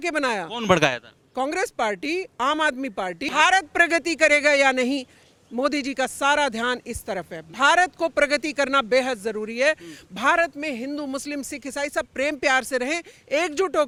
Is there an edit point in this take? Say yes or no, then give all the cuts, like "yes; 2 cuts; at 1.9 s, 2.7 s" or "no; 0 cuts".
no; 0 cuts